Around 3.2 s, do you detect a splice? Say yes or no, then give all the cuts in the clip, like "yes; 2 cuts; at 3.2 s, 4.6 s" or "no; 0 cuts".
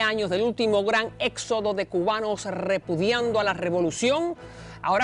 no; 1 cut; at 1.3 s